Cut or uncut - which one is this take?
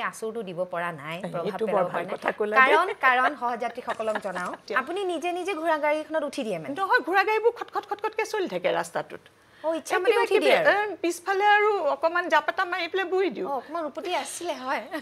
cut